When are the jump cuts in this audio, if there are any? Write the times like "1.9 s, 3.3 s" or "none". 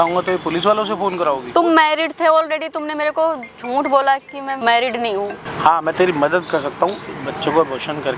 1.4 s, 4.6 s, 5.4 s